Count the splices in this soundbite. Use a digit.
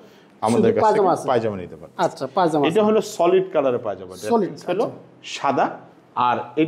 0